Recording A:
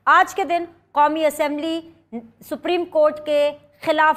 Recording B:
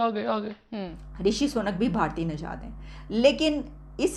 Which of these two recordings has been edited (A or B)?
B